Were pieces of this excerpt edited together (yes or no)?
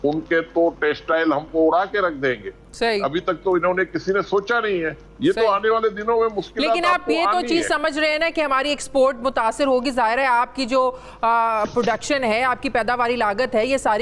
no